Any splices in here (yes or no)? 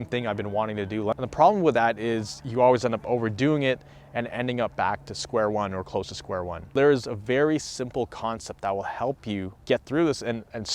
yes